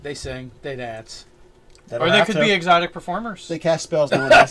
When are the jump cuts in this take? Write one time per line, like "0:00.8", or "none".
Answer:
0:02.4